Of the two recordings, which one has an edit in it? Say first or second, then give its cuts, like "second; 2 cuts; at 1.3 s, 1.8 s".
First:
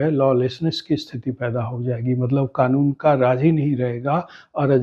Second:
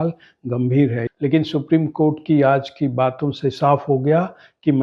second; 1 cut; at 1.0 s